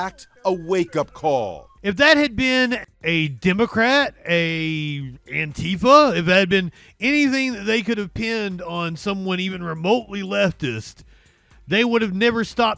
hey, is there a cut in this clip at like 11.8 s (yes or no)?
no